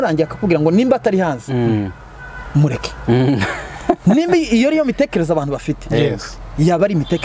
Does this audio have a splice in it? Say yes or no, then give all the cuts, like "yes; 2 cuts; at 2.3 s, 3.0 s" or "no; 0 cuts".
no; 0 cuts